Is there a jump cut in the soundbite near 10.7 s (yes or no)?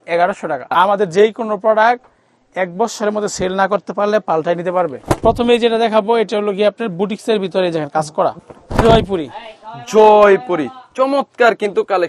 no